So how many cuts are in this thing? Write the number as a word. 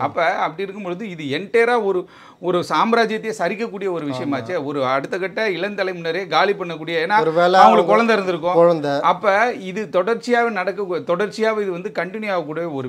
zero